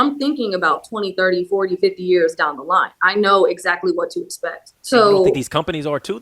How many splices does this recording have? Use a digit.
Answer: 1